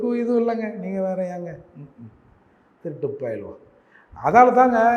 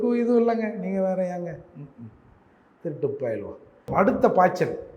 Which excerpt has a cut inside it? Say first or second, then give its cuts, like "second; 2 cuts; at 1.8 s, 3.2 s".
second; 1 cut; at 3.9 s